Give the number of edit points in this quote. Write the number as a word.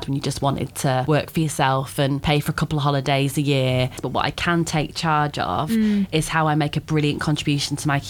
three